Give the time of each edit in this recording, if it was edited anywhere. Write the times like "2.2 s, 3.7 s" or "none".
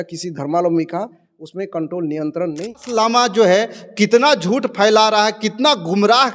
2.7 s